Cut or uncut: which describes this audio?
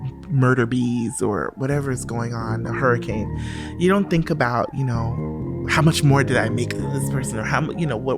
uncut